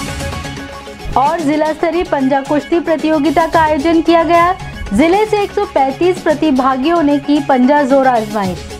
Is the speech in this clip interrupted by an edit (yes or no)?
yes